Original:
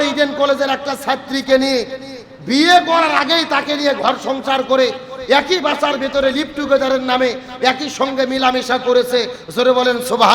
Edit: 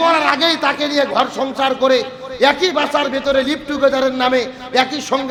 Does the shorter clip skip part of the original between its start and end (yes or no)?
no